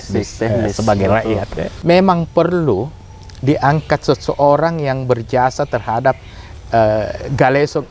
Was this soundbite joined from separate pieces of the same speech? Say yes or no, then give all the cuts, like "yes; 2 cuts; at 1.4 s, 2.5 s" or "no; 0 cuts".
yes; 1 cut; at 1.7 s